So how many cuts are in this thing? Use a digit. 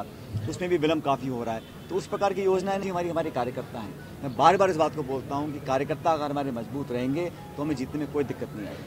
1